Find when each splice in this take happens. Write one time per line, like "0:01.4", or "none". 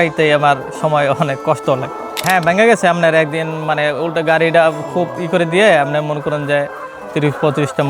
0:02.2